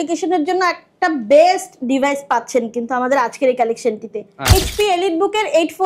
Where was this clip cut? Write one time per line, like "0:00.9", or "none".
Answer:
0:04.5